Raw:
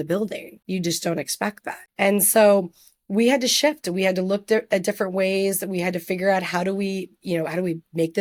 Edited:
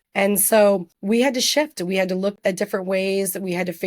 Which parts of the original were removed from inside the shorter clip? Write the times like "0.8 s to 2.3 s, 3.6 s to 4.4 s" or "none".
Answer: 2.8 s to 3.0 s, 4.4 s to 4.6 s